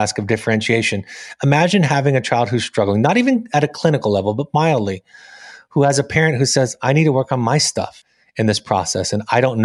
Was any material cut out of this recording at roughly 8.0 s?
yes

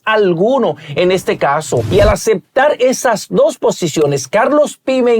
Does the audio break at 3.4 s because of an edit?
no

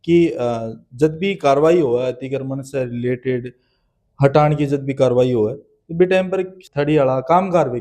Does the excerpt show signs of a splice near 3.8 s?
no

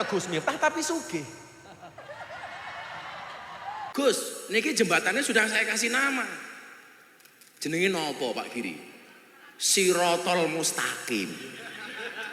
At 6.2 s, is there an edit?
no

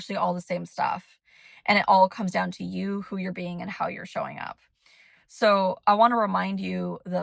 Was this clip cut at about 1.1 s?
no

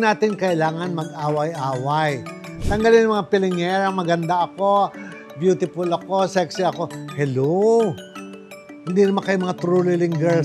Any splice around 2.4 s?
yes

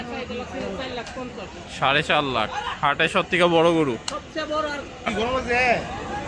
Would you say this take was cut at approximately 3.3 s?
no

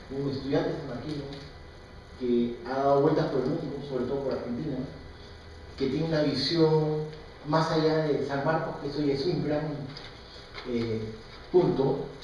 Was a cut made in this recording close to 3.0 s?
yes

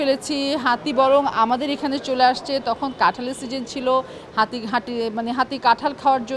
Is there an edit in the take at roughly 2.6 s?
no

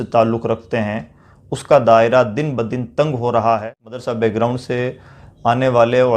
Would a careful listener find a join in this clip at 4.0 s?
yes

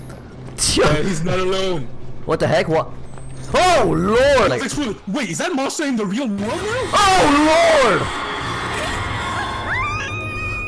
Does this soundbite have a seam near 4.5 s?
yes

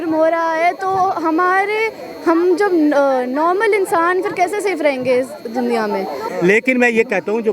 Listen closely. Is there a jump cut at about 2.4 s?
no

